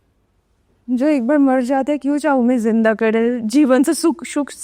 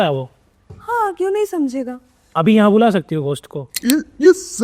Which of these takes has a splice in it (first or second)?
second